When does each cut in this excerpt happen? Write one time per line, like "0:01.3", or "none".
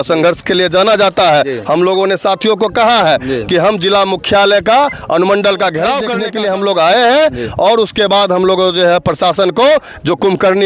0:06.2